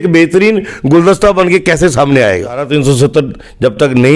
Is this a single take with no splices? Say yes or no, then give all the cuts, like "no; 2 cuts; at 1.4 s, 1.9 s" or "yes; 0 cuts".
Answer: no; 1 cut; at 2.7 s